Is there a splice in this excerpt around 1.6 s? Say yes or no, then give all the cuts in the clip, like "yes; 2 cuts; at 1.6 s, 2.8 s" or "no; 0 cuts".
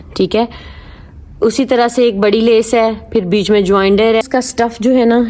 no; 1 cut; at 4.2 s